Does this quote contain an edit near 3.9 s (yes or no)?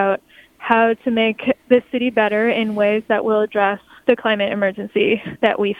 yes